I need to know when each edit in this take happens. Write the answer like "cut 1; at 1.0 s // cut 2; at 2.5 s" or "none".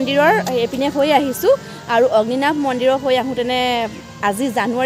none